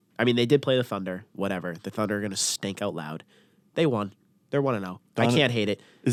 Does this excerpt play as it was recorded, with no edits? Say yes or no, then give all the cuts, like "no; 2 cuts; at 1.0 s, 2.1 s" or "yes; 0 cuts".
yes; 0 cuts